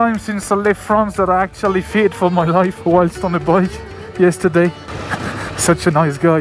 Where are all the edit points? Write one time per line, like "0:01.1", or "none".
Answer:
0:05.1